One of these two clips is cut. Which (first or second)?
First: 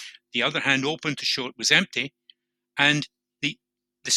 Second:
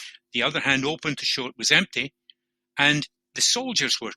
second